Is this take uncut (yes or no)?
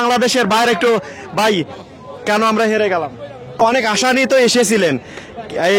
no